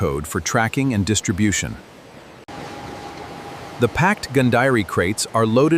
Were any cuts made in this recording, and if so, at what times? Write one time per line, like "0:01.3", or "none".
none